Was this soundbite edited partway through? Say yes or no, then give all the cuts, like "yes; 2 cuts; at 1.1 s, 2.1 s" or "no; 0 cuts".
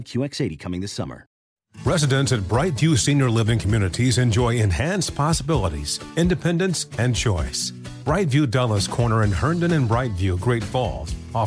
yes; 1 cut; at 1.4 s